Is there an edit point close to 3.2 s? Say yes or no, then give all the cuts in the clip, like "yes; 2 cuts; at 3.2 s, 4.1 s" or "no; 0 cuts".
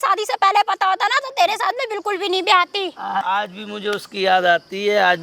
yes; 1 cut; at 3.2 s